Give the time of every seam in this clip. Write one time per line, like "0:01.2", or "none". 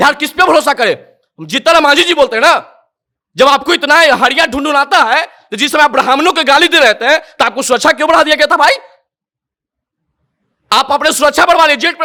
none